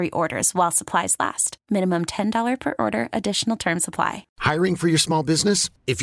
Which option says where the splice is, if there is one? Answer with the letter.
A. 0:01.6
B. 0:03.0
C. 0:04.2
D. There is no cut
C